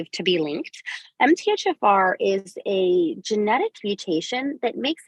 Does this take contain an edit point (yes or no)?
no